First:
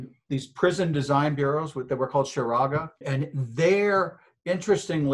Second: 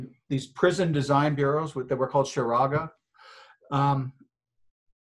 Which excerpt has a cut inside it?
first; 1 cut; at 3.0 s

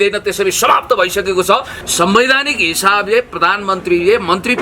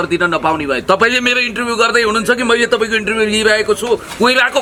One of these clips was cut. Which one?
first; 1 cut; at 1.7 s

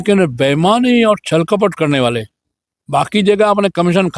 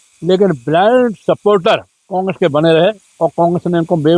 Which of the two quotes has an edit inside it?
second; 2 cuts; at 2.0 s, 3.1 s

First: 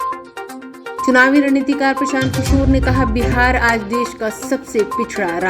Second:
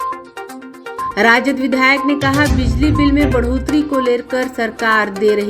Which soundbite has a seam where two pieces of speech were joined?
first; 1 cut; at 0.9 s

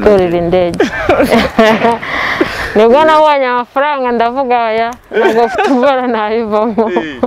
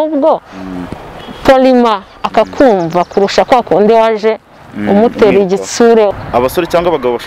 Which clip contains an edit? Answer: second; 1 cut; at 6.1 s

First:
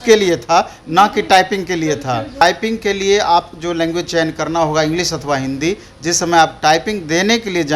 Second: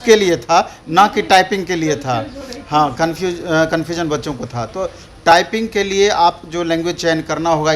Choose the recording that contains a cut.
first; 1 cut; at 2.4 s

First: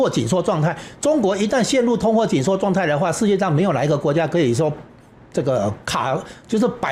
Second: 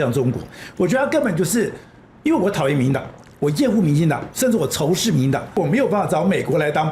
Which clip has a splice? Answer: second; 1 cut; at 5.6 s

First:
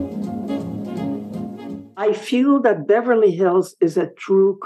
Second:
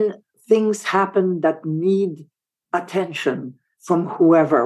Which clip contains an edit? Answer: first; 1 cut; at 2.0 s

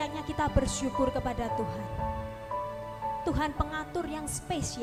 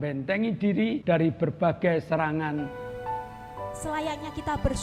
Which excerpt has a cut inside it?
second; 2 cuts; at 1.0 s, 2.8 s

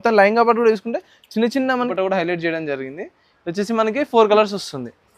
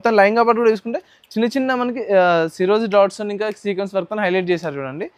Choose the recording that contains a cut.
first; 1 cut; at 1.9 s

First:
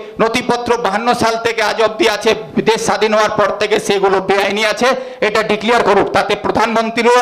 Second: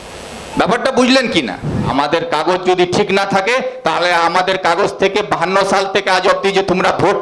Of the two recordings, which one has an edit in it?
second; 1 cut; at 1.9 s

